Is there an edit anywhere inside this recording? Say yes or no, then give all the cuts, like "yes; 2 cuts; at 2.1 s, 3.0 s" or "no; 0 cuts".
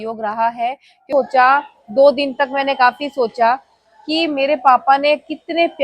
yes; 1 cut; at 1.1 s